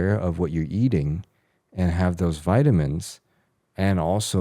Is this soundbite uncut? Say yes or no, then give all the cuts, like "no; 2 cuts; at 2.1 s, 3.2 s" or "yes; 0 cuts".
yes; 0 cuts